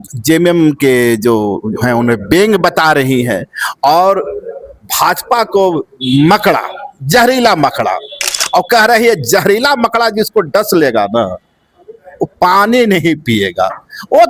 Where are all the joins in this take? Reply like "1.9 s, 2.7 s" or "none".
none